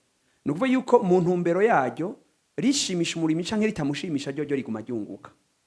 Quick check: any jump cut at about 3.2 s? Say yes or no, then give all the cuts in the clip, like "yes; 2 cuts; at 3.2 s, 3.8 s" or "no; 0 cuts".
no; 0 cuts